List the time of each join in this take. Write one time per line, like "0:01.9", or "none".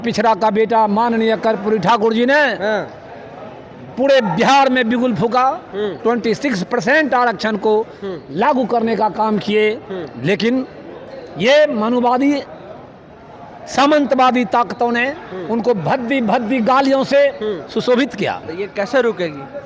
0:06.0
0:18.4